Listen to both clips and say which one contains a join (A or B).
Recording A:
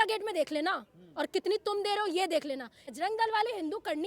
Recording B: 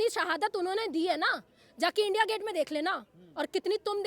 A